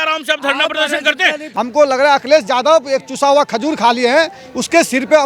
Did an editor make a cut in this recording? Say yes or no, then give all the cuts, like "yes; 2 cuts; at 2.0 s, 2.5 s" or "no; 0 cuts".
yes; 1 cut; at 1.4 s